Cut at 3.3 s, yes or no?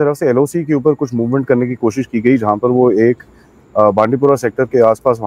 no